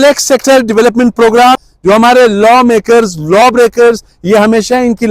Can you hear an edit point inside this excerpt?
yes; 1 cut; at 1.6 s

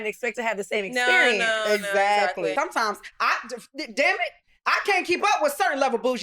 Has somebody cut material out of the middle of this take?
yes; 1 cut; at 2.5 s

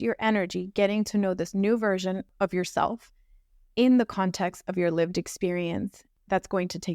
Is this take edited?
yes; 2 cuts; at 2.3 s, 6.1 s

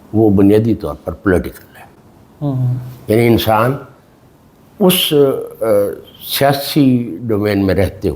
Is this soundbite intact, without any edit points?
yes; 0 cuts

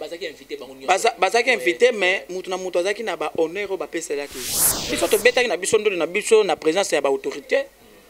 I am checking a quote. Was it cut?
yes; 1 cut; at 4.9 s

